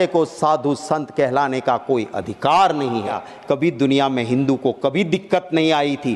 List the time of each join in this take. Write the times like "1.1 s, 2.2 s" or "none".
3.3 s